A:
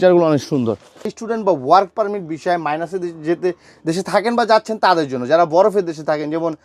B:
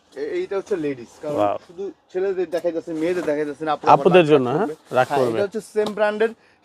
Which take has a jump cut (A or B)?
A